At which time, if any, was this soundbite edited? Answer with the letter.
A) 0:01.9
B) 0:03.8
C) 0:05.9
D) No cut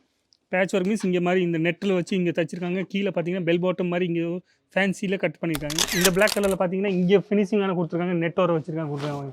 C